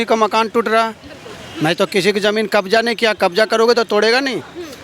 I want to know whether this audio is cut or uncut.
uncut